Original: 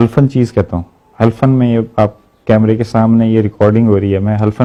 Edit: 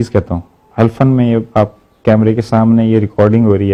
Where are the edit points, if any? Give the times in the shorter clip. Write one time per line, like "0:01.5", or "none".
none